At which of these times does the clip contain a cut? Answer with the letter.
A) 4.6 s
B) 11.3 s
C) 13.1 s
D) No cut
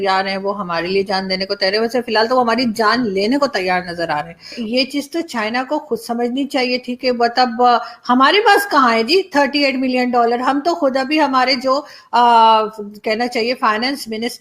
A